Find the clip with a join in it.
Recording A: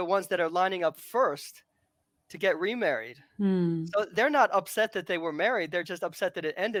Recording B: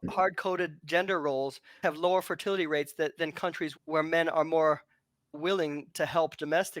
B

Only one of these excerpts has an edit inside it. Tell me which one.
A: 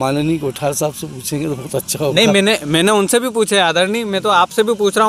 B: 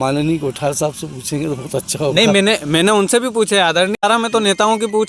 B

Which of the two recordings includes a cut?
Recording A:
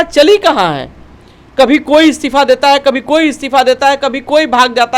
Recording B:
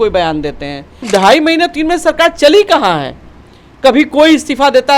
B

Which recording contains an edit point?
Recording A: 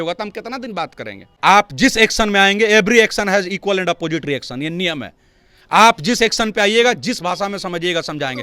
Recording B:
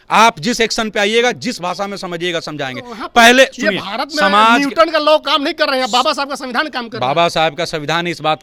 A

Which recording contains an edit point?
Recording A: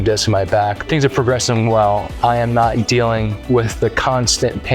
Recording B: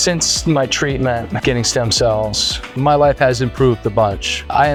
A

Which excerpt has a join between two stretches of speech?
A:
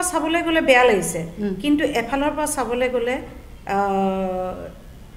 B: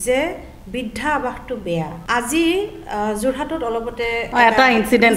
B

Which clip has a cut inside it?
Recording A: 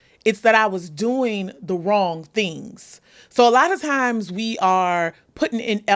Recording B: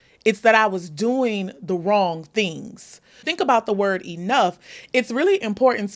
B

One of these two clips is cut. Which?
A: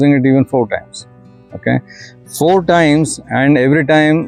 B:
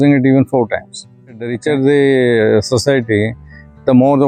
B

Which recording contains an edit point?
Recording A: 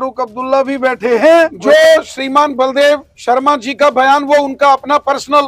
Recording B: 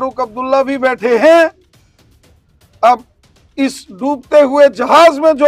A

